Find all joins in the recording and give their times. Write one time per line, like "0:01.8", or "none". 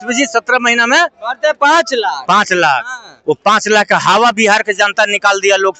none